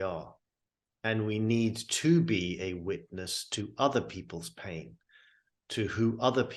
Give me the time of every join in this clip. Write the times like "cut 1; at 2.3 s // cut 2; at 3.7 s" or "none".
none